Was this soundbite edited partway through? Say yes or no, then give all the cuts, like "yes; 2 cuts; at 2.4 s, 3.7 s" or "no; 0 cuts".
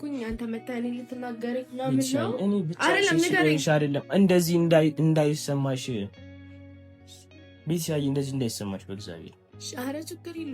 yes; 2 cuts; at 6.2 s, 7.6 s